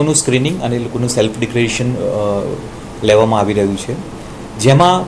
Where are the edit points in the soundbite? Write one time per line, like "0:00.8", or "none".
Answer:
none